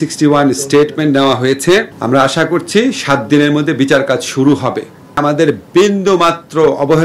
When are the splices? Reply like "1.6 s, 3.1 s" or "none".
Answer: 1.9 s, 5.2 s

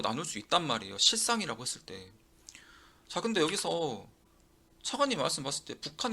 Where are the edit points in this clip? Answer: none

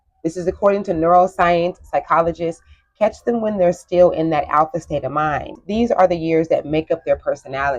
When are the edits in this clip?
5.6 s

